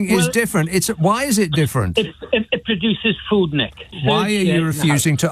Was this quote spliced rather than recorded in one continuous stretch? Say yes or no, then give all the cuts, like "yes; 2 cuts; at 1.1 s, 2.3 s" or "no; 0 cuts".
yes; 1 cut; at 3.9 s